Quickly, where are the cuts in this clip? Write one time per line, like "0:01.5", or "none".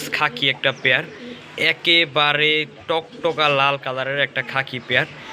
none